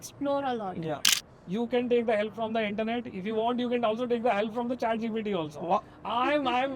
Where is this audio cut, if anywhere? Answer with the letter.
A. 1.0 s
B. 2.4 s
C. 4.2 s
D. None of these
A